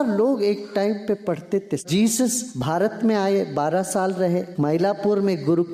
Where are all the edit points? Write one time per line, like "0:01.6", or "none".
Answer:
0:01.8
0:02.5
0:04.5